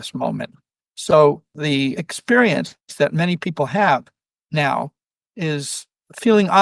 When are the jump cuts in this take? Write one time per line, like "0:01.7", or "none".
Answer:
0:01.8
0:02.8